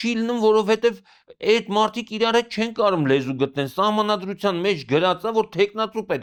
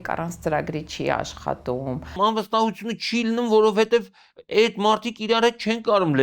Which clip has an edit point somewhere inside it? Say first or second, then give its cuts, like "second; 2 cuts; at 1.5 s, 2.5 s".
second; 1 cut; at 2.1 s